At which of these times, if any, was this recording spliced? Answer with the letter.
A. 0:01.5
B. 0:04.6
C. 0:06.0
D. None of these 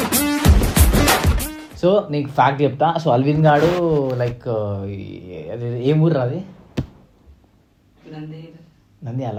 D